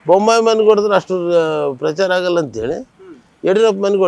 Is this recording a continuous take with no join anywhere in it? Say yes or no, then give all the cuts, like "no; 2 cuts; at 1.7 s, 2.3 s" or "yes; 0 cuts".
yes; 0 cuts